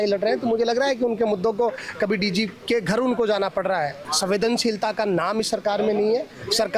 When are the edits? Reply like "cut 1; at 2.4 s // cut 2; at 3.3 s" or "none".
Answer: cut 1; at 4.0 s